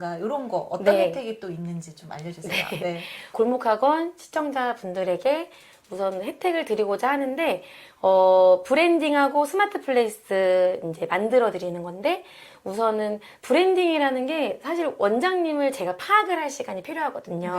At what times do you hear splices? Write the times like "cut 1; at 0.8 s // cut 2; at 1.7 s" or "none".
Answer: cut 1; at 3.3 s